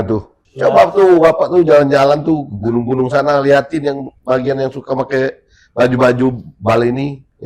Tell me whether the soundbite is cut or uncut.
uncut